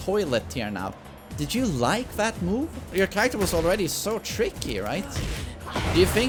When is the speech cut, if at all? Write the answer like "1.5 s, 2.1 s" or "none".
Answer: none